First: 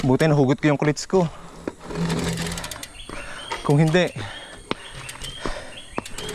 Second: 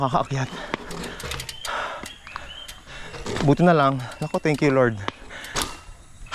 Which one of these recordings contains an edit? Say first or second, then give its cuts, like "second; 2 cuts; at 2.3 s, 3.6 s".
second; 1 cut; at 2.9 s